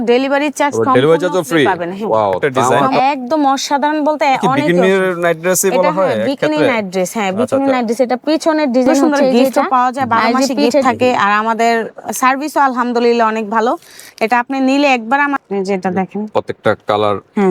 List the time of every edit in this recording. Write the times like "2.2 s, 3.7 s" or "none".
2.9 s, 10.8 s, 15.4 s

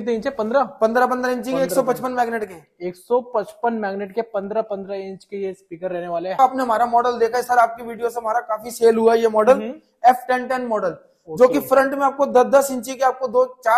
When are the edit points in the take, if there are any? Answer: 6.4 s

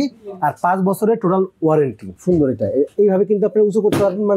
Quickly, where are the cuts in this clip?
2.1 s

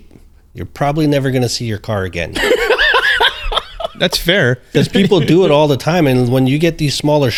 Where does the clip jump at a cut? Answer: none

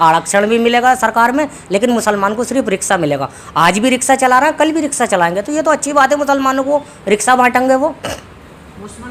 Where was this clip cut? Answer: none

